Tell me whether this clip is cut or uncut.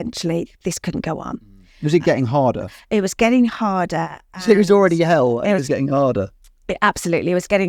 uncut